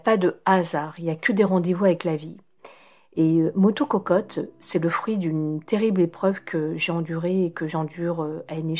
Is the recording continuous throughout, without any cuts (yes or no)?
yes